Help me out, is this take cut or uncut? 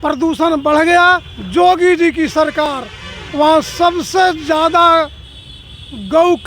cut